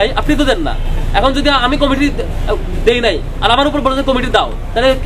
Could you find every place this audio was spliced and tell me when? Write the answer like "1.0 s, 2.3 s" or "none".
none